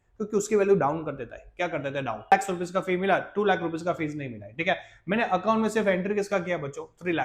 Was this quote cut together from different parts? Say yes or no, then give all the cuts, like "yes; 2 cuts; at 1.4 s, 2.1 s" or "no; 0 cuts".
yes; 1 cut; at 2.3 s